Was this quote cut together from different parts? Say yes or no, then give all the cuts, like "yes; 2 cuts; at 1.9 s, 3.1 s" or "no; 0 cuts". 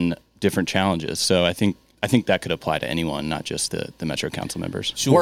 yes; 1 cut; at 1.9 s